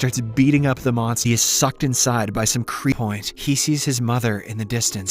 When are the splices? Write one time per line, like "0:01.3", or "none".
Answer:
0:01.2
0:02.9